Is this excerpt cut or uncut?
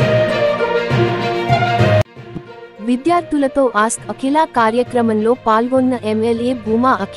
uncut